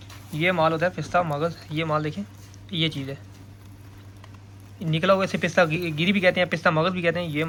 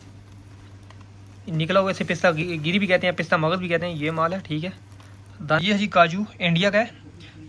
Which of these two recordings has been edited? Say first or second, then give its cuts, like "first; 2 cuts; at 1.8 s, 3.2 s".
second; 1 cut; at 5.6 s